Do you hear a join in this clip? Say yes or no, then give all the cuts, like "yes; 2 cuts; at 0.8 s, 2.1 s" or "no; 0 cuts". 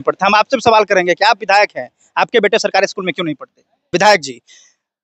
yes; 1 cut; at 3.9 s